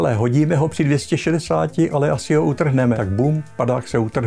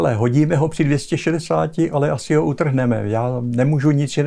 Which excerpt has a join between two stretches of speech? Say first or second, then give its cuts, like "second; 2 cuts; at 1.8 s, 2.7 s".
first; 1 cut; at 3.0 s